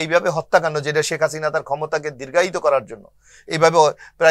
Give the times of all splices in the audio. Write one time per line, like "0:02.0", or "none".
none